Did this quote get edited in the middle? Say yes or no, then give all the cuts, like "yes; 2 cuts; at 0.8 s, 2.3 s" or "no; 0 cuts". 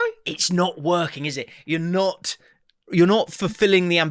no; 0 cuts